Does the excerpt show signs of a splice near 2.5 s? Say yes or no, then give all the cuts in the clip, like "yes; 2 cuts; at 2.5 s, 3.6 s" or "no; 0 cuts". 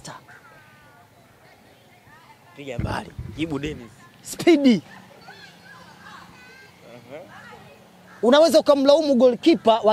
no; 0 cuts